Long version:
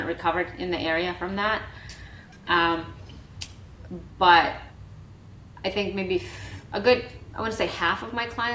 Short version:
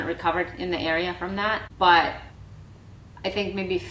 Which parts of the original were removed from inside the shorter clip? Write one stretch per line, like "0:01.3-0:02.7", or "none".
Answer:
0:01.7-0:04.1